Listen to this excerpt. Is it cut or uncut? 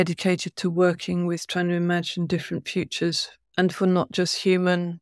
uncut